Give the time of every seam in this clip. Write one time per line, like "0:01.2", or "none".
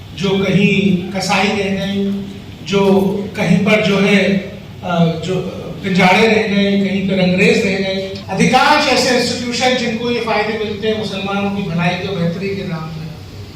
0:08.2